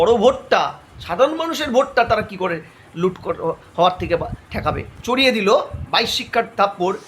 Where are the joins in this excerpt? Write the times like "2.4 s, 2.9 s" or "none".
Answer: 4.9 s

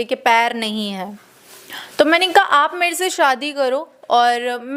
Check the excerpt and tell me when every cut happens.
none

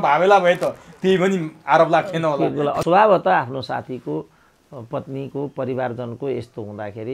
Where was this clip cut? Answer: 2.8 s

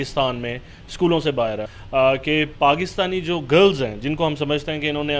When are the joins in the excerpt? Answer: 1.6 s

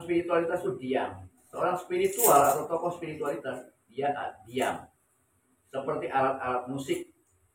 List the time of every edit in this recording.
1.4 s

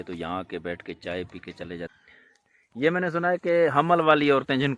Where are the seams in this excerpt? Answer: 1.9 s

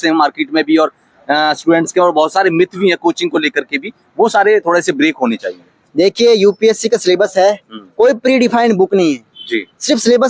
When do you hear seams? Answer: none

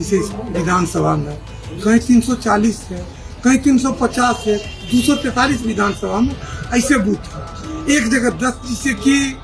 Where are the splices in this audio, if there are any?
none

